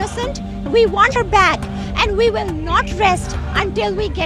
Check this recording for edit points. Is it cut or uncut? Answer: cut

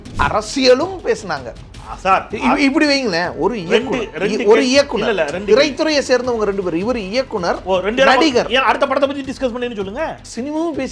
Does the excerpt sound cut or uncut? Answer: uncut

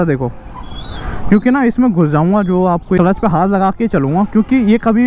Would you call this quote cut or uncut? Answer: cut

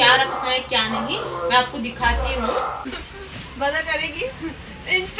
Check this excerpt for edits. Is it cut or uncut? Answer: cut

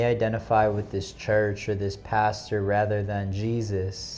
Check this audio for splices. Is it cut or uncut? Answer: uncut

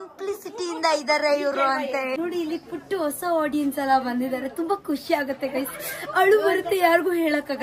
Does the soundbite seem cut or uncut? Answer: cut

